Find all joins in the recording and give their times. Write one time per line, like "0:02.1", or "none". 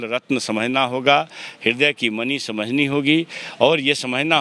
none